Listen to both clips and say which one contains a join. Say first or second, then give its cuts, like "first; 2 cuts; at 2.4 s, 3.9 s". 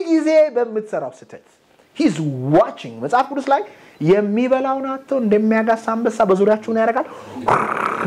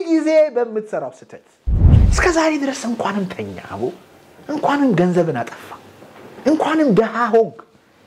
second; 1 cut; at 1.8 s